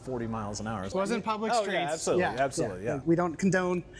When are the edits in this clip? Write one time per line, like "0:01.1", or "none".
0:00.9
0:03.0